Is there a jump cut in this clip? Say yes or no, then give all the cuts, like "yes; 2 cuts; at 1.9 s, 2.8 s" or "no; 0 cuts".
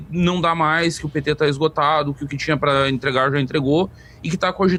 no; 0 cuts